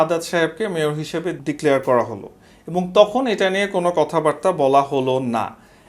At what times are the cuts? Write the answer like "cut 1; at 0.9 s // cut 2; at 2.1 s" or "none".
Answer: cut 1; at 1.4 s